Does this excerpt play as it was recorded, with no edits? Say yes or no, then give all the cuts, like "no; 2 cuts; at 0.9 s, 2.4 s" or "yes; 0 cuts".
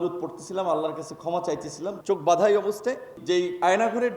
no; 2 cuts; at 2.0 s, 3.2 s